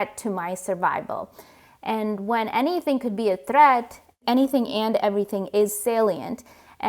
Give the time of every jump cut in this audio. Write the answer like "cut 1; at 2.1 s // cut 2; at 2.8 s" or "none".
cut 1; at 4.2 s